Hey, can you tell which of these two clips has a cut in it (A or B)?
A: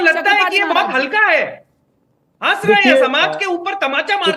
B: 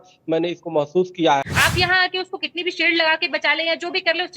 B